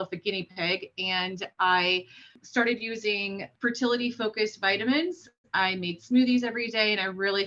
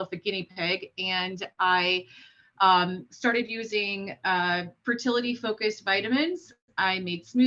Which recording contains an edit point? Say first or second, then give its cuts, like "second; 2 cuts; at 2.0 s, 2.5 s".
first; 2 cuts; at 2.4 s, 3.5 s